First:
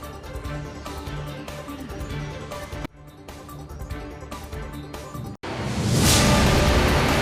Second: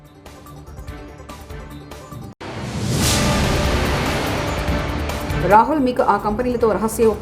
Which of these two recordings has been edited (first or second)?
second